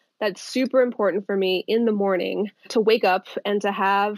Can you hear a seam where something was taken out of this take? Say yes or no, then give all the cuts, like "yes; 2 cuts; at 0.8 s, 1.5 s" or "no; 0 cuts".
yes; 1 cut; at 2.7 s